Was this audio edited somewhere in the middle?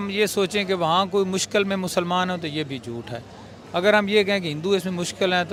no; 0 cuts

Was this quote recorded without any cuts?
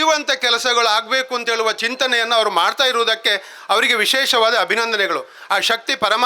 yes; 0 cuts

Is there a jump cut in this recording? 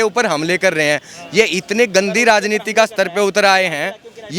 no; 0 cuts

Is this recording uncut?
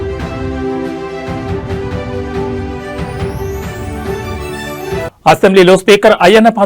no; 1 cut; at 4.4 s

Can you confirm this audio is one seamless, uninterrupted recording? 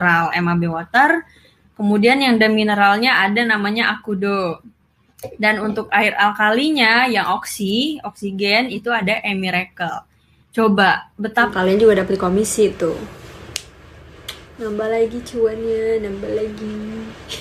no; 1 cut; at 11.5 s

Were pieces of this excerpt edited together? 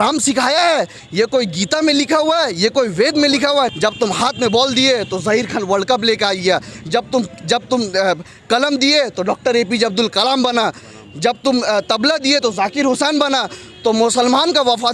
yes; 1 cut; at 3.7 s

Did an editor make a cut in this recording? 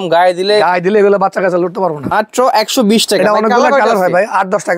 yes; 1 cut; at 2.1 s

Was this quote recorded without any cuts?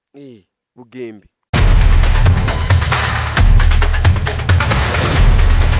no; 1 cut; at 1.3 s

